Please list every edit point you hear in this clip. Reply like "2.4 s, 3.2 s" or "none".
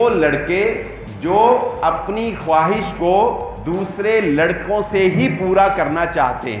none

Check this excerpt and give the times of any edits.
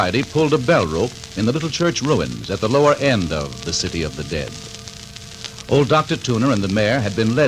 6.1 s

